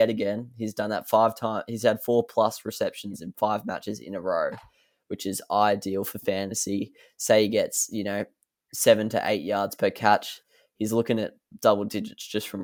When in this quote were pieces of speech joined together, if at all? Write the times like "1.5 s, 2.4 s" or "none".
none